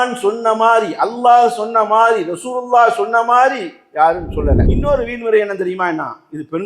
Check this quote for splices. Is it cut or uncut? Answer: cut